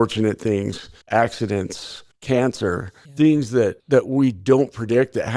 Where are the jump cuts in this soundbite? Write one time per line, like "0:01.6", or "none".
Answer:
none